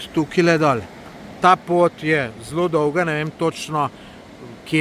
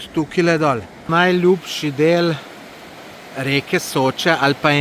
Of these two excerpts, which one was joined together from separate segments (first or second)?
second